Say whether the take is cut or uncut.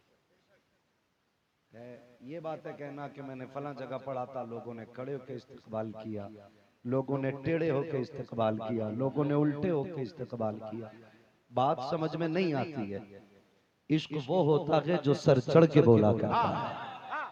uncut